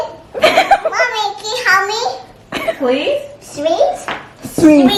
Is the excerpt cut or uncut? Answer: uncut